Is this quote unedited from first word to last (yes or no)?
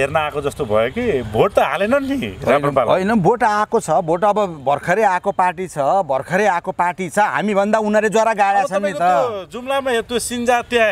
yes